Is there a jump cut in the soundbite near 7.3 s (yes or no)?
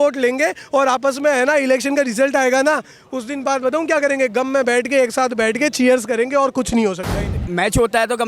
yes